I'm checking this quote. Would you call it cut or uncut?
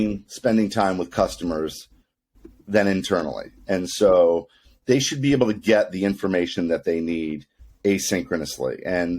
uncut